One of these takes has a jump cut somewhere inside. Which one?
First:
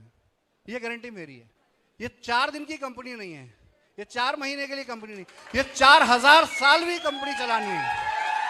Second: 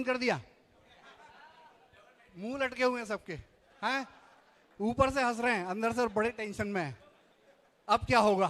first; 1 cut; at 2.0 s

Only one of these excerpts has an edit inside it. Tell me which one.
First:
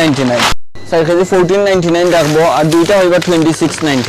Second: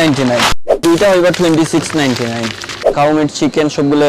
second; 2 cuts; at 0.8 s, 2.9 s

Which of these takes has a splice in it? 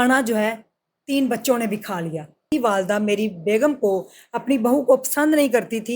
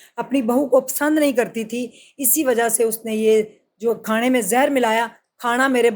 first; 1 cut; at 2.5 s

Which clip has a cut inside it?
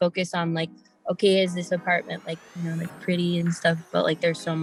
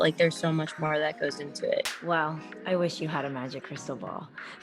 second; 1 cut; at 1.9 s

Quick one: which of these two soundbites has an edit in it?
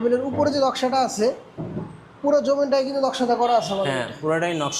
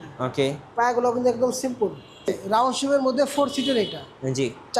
second; 1 cut; at 2.2 s

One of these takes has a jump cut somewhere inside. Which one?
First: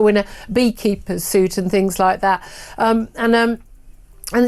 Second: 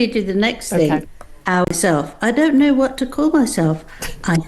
second; 1 cut; at 1.6 s

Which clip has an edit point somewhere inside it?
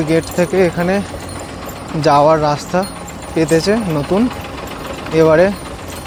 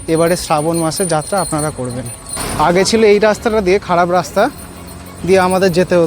second; 1 cut; at 2.4 s

